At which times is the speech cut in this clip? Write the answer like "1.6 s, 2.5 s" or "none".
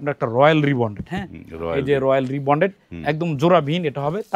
none